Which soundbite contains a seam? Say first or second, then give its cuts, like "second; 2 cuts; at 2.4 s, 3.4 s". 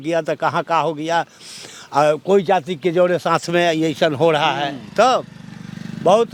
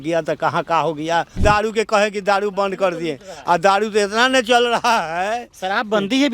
second; 1 cut; at 1.4 s